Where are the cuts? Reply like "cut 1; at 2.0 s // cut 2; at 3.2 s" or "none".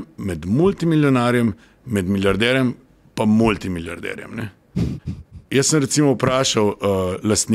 none

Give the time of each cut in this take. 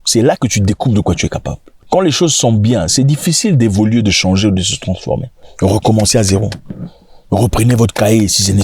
cut 1; at 5.3 s

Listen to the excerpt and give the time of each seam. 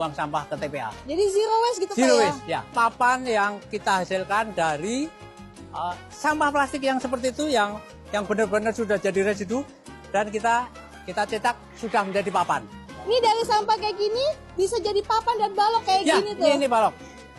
cut 1; at 2.7 s // cut 2; at 3.7 s

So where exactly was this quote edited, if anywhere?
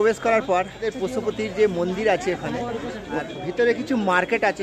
cut 1; at 0.9 s // cut 2; at 3.2 s

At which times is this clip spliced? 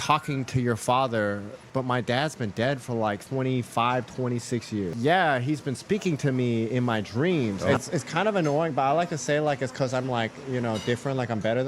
cut 1; at 1.6 s // cut 2; at 3.2 s // cut 3; at 4.9 s // cut 4; at 7.7 s

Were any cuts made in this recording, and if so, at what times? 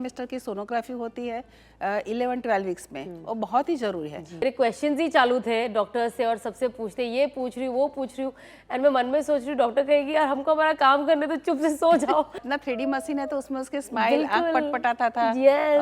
cut 1; at 4.4 s // cut 2; at 12.4 s

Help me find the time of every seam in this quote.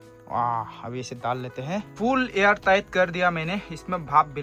cut 1; at 1.9 s

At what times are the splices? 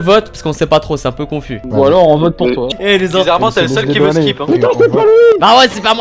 cut 1; at 2.6 s // cut 2; at 4.4 s

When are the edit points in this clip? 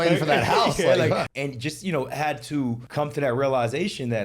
cut 1; at 1.3 s // cut 2; at 2.8 s

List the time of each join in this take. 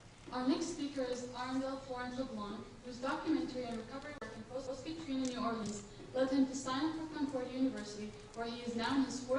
none

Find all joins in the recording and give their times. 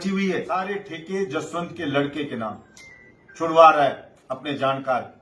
cut 1; at 0.9 s

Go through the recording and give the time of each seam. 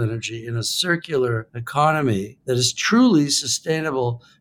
cut 1; at 1.6 s // cut 2; at 2.3 s

